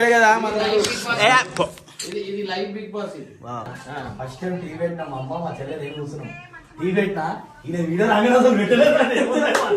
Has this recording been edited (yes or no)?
yes